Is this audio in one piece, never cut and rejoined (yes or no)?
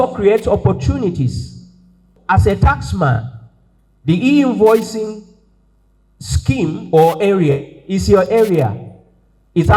no